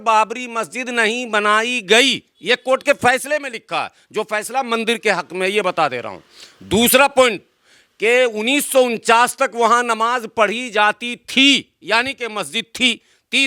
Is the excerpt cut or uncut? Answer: uncut